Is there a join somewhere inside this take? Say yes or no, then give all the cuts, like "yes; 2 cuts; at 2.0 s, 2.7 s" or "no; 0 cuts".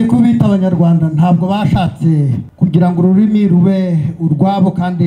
yes; 1 cut; at 2.4 s